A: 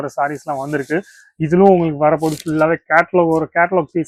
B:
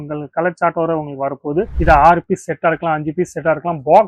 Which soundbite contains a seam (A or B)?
B